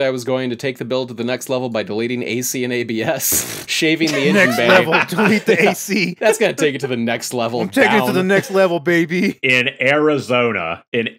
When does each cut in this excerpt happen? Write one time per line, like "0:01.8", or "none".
none